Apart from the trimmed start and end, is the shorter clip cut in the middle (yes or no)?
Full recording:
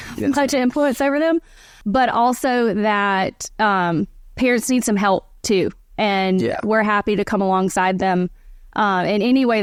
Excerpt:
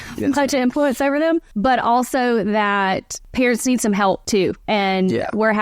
yes